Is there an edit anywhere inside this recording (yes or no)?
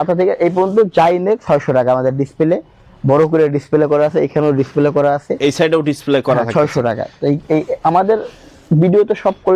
no